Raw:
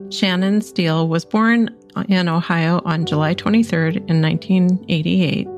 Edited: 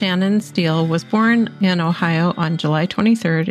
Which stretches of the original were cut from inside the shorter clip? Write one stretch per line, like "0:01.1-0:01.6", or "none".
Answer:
0:01.7-0:02.0